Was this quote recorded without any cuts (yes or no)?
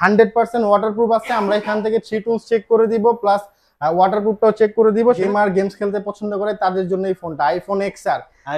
no